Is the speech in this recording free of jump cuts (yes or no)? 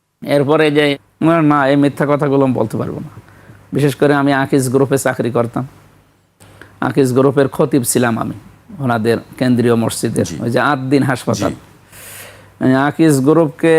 no